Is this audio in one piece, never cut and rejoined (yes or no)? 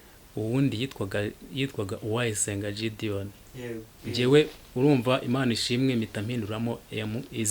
no